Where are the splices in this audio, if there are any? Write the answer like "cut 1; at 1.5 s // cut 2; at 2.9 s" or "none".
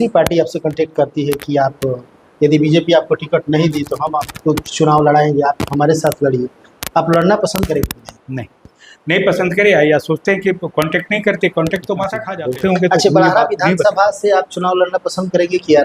cut 1; at 12.2 s